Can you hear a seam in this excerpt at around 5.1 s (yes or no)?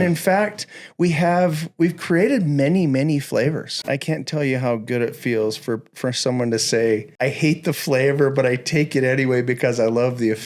no